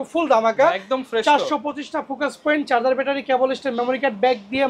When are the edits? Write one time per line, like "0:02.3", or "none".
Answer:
none

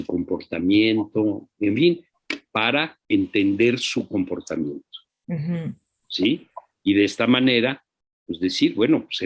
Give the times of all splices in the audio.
0:02.9

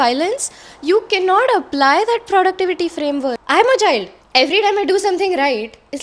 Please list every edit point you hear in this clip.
0:03.4

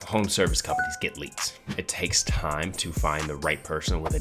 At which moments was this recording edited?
0:01.7

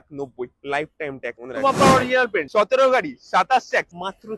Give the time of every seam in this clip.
0:01.5

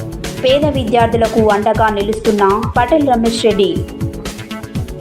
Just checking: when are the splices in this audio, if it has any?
none

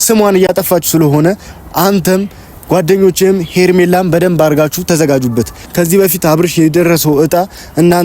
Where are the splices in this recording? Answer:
0:05.6

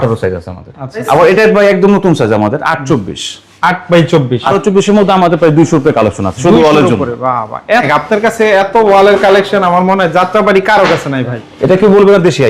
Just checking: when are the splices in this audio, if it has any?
0:01.0
0:04.5
0:07.9
0:11.4

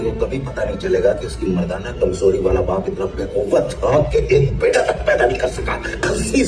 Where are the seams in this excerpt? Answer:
none

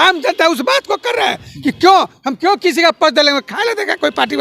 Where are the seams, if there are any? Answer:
none

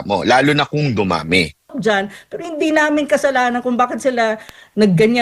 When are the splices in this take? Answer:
0:01.8

